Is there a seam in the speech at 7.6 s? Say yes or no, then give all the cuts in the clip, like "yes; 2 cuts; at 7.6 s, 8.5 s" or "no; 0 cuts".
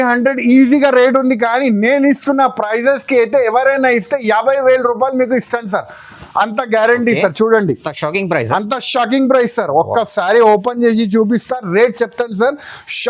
no; 0 cuts